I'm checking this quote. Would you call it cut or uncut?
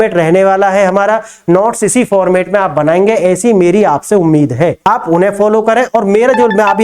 cut